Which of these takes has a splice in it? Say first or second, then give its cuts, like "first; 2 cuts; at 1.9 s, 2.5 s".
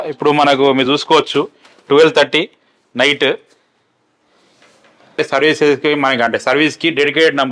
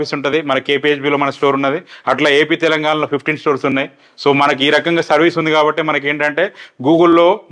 first; 1 cut; at 5.1 s